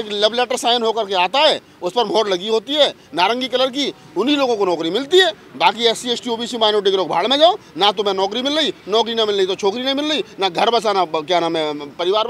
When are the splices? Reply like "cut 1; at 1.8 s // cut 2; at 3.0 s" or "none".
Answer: none